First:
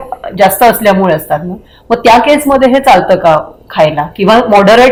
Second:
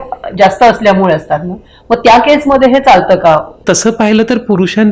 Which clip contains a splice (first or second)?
second